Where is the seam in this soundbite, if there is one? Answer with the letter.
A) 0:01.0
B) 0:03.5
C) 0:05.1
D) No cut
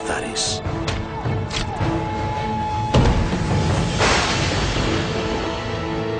A